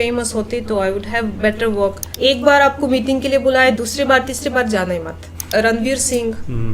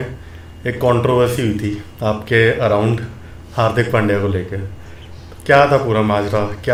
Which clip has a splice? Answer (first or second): first